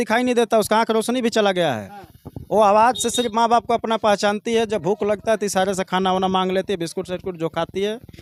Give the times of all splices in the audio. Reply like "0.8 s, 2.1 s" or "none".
none